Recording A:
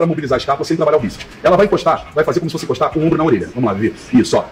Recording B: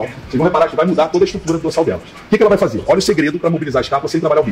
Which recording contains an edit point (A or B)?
A